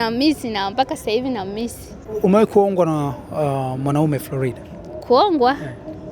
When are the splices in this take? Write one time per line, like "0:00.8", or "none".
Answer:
0:02.1